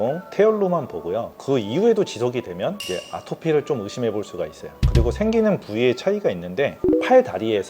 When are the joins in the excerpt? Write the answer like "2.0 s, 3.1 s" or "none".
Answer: 6.8 s